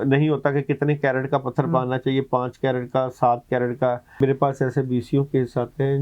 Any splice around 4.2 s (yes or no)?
yes